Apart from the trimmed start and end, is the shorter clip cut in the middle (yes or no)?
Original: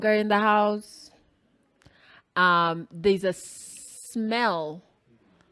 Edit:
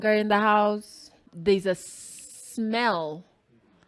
yes